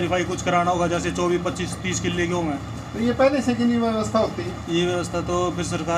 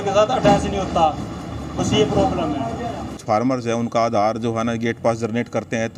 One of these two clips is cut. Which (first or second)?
second